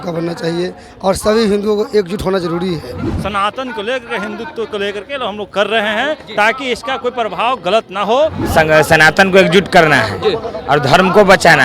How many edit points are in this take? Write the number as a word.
two